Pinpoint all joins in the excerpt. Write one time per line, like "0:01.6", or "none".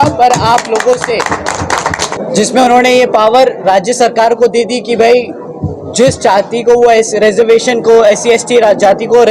0:02.1